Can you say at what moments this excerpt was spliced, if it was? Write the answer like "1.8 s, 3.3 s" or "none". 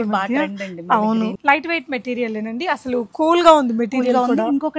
1.4 s